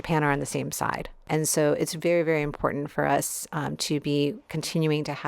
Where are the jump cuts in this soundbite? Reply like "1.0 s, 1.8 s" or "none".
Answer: 1.2 s